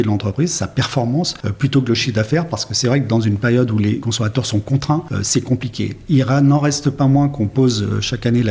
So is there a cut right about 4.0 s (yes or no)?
yes